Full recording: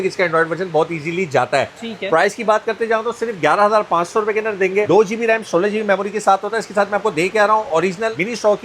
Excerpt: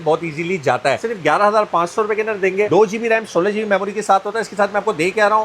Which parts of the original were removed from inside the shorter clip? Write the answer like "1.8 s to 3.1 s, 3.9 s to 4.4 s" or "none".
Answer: 1.7 s to 3.2 s